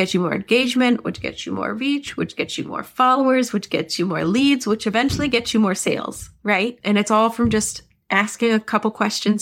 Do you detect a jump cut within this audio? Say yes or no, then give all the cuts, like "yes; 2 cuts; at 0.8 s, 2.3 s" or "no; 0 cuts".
yes; 1 cut; at 6.8 s